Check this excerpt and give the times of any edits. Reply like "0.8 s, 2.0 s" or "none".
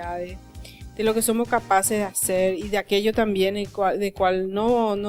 none